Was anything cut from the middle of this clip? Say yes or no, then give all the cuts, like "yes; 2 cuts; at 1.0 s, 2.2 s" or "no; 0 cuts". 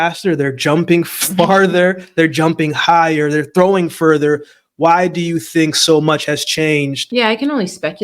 yes; 1 cut; at 7.0 s